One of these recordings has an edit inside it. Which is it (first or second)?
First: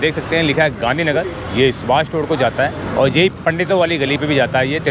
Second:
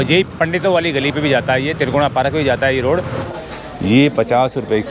second